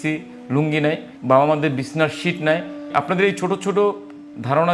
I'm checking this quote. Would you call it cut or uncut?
cut